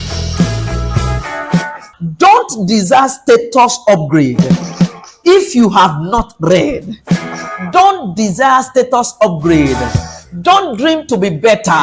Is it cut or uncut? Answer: cut